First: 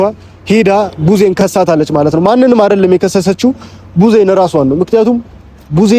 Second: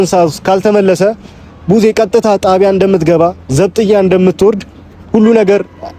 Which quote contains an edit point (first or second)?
first